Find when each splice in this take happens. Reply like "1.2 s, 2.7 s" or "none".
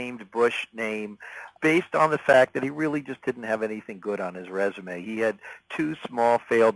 none